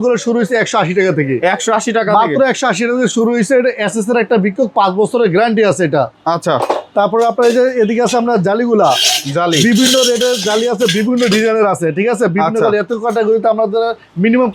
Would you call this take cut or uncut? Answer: uncut